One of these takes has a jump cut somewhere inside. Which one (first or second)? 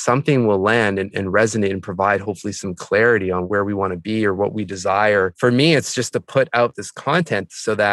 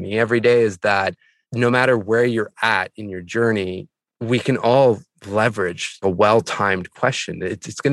first